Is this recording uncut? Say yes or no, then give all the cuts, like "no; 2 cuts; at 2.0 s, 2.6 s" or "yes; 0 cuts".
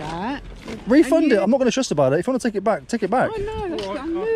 yes; 0 cuts